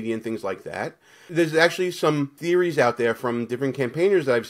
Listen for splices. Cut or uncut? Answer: cut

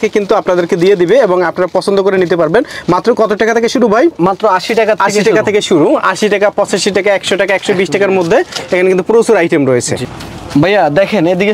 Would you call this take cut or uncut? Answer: uncut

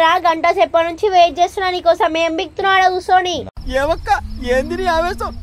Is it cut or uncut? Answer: uncut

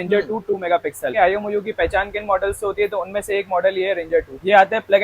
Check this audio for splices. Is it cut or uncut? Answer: cut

